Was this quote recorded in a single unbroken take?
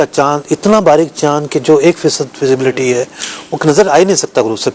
yes; 0 cuts

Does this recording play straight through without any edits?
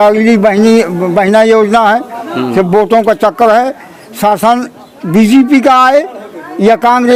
yes; 0 cuts

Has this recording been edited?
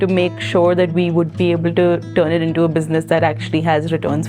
no; 0 cuts

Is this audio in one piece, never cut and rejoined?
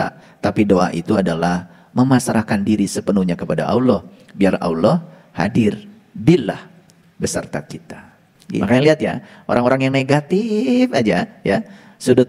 no; 1 cut; at 8.6 s

